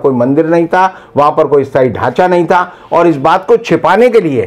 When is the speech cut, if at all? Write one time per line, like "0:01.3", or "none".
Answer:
none